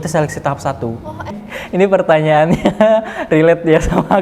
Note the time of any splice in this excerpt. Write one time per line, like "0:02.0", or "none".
0:01.4